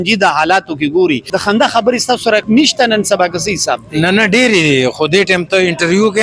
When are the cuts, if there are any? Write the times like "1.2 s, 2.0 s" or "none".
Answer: 1.3 s, 2.4 s